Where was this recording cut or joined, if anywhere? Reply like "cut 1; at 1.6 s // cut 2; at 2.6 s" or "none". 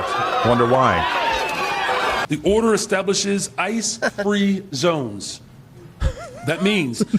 cut 1; at 2.2 s